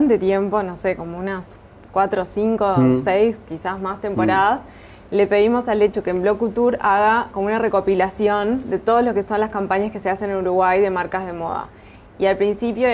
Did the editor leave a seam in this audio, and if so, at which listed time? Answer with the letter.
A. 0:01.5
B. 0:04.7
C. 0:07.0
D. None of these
A